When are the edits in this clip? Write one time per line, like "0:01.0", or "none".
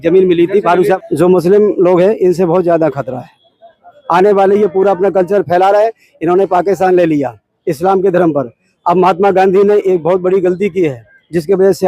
0:01.0

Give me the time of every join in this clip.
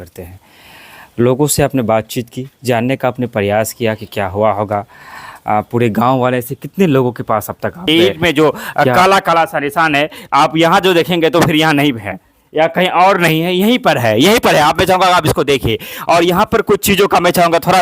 0:07.8

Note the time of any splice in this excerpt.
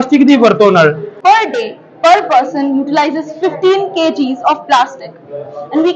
0:01.1

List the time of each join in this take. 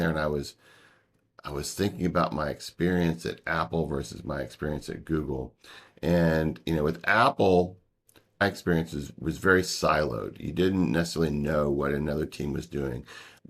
0:08.2

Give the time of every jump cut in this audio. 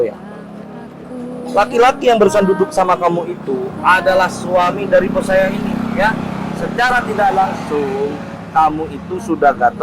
none

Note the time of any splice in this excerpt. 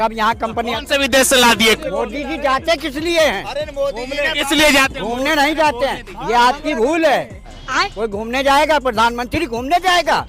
0:01.8
0:07.6

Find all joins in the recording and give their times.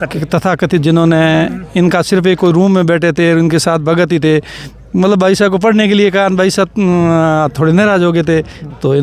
none

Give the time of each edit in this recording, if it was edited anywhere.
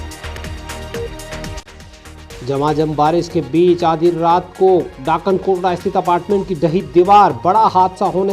0:01.6

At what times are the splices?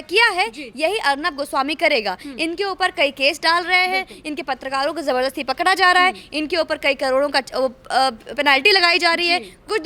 none

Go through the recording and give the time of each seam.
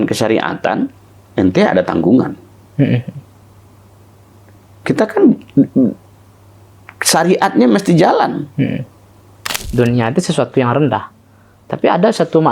0:09.5

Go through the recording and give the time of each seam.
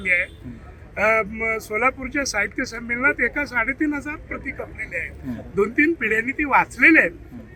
none

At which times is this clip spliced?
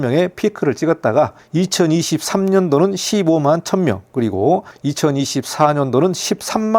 none

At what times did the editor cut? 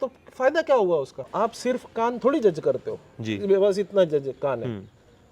0:01.3

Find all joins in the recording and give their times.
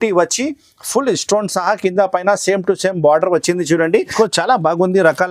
0:04.1

